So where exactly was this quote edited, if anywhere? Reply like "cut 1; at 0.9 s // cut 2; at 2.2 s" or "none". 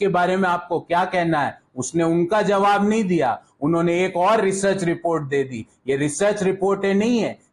none